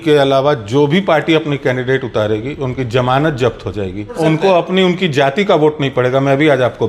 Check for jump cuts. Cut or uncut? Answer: cut